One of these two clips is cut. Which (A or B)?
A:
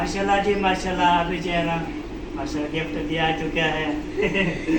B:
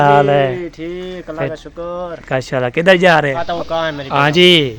B